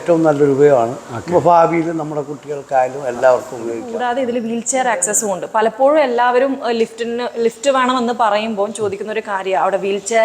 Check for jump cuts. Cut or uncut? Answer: cut